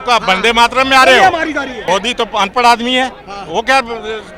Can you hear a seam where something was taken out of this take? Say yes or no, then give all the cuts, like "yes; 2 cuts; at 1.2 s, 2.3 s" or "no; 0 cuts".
yes; 1 cut; at 1.7 s